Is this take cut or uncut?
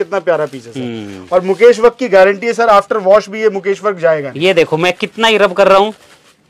uncut